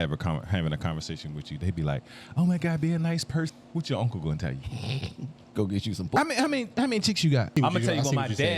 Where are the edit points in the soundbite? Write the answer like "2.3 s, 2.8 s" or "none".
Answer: 3.5 s, 6.1 s, 7.5 s